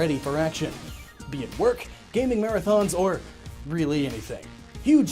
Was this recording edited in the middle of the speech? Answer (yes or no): yes